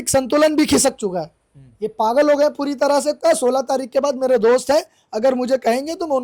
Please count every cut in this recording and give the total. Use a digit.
1